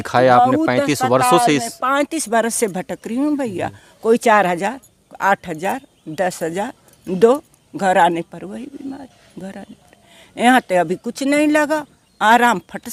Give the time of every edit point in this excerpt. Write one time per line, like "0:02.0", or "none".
none